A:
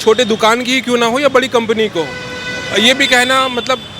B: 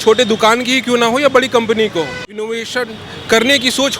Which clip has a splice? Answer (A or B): B